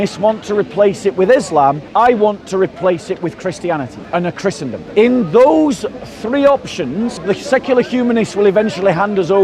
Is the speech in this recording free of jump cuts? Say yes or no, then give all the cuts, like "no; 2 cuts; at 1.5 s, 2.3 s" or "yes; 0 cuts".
no; 4 cuts; at 1.8 s, 4.0 s, 4.8 s, 7.2 s